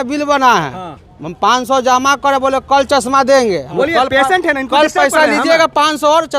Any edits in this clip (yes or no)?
no